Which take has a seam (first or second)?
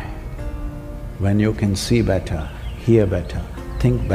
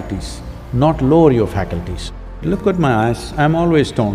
second